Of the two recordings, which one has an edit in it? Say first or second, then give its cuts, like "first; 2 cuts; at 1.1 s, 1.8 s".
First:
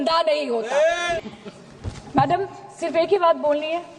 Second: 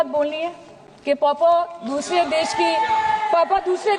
first; 1 cut; at 1.1 s